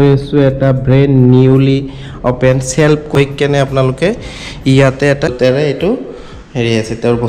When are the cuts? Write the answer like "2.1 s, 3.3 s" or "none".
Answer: 3.2 s, 5.3 s